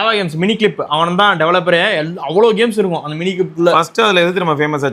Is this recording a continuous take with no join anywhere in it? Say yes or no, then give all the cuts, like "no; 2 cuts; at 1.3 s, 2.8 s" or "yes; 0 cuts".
yes; 0 cuts